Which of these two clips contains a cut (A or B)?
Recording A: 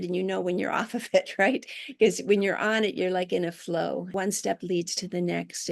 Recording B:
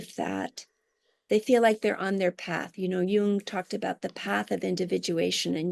A